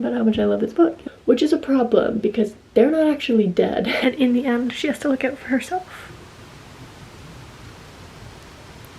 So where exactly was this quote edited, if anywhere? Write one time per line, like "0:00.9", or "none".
0:01.0
0:03.9